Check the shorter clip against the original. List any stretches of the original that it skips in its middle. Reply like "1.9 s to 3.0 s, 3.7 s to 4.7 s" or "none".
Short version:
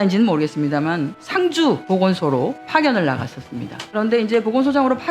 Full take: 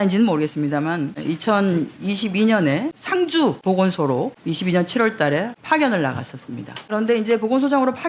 1.2 s to 3.0 s, 4.4 s to 5.6 s